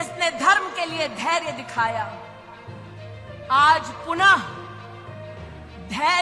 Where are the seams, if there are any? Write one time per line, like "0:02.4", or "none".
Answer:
none

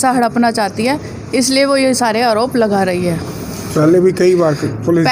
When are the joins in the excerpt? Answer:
none

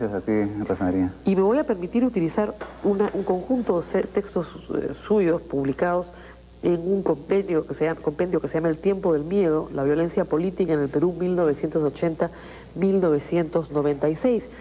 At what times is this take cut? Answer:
0:04.3

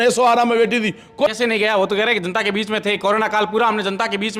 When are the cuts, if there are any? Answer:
0:01.3

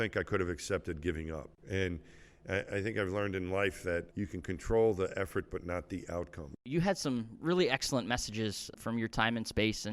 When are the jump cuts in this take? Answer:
0:01.5
0:04.1
0:06.7
0:08.7

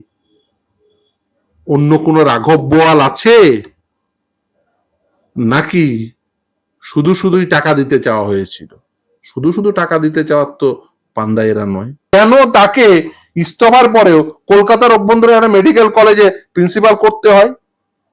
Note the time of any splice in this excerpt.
0:12.1

